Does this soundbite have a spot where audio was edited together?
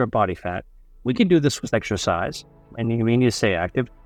no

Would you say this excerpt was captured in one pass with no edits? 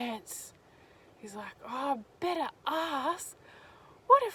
yes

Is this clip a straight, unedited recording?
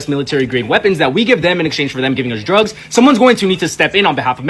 no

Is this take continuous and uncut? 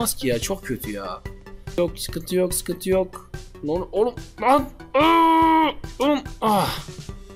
no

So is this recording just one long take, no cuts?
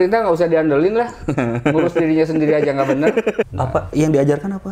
no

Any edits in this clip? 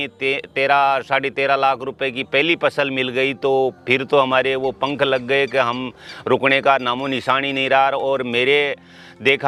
no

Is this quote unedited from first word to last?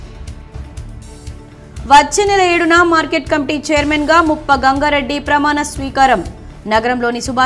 no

